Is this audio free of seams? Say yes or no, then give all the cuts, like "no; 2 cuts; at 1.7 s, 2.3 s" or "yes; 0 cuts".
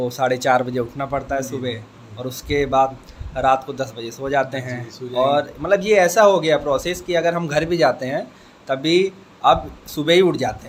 yes; 0 cuts